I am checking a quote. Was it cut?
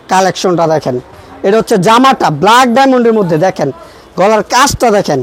no; 0 cuts

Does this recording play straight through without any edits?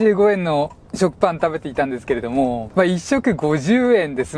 no; 1 cut; at 2.6 s

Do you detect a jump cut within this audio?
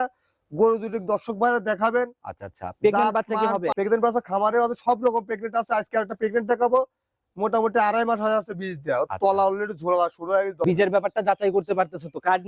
yes; 2 cuts; at 3.7 s, 10.6 s

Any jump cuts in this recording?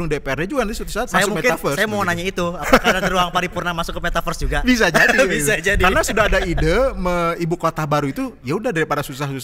no; 0 cuts

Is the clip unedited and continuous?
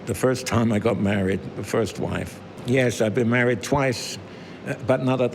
no; 1 cut; at 2.5 s

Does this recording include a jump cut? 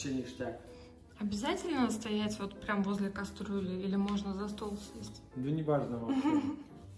no; 0 cuts

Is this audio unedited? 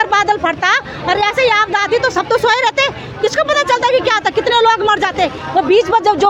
yes; 0 cuts

